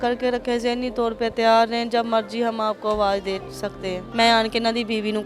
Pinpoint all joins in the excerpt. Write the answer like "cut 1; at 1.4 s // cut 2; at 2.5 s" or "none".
cut 1; at 3.9 s